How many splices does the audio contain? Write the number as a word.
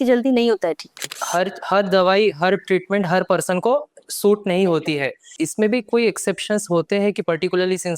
two